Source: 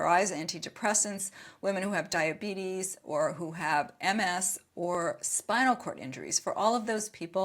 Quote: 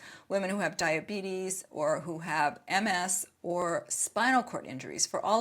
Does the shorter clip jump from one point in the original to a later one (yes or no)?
no